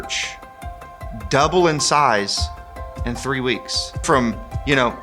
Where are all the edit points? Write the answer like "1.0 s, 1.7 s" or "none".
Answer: 4.0 s